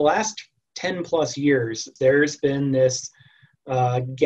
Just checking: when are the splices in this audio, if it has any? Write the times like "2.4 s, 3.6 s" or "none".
1.9 s